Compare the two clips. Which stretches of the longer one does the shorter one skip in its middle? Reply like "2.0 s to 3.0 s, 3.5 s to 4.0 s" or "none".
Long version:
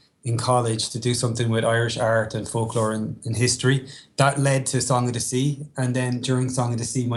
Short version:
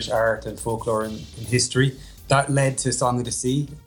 none